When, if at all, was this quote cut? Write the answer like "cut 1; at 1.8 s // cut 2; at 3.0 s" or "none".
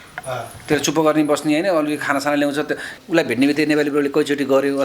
cut 1; at 3.0 s